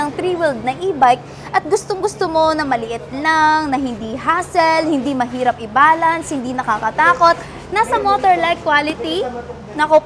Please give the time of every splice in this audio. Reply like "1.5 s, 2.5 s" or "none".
none